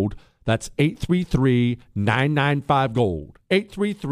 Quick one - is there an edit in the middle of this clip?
no; 0 cuts

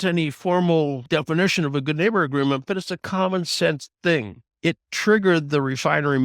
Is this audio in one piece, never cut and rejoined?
no; 2 cuts; at 1.0 s, 4.4 s

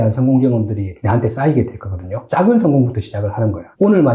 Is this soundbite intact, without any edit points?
yes; 0 cuts

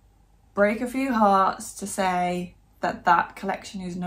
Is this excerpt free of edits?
yes; 0 cuts

